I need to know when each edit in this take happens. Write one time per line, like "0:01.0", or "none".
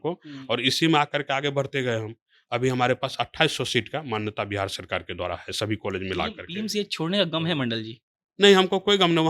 none